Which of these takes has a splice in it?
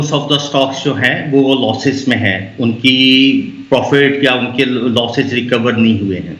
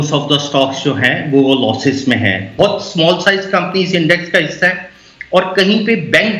second; 1 cut; at 2.6 s

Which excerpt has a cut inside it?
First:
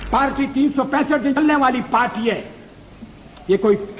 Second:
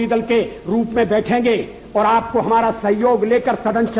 first; 1 cut; at 1.4 s

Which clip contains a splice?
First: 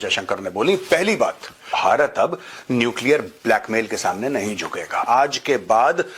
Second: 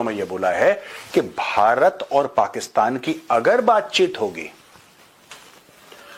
first; 2 cuts; at 1.7 s, 5.0 s

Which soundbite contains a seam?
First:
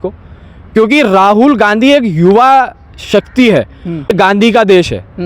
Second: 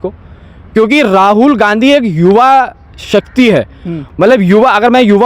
first; 1 cut; at 4.1 s

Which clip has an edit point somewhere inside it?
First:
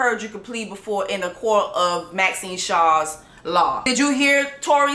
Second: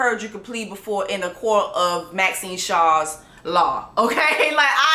first; 1 cut; at 3.8 s

